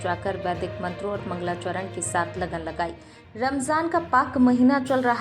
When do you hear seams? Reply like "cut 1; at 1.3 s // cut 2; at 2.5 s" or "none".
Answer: cut 1; at 3.1 s